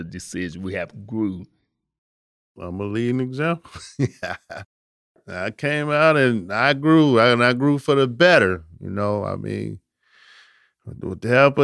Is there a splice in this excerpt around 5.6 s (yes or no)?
no